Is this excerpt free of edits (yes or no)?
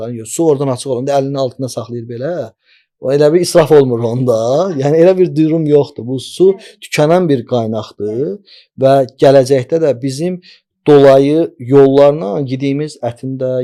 yes